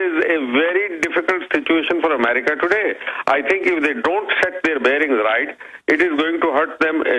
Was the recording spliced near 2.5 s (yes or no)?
yes